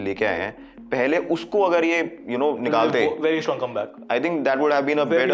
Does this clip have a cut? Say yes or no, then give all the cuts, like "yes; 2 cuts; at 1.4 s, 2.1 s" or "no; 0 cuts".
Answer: no; 0 cuts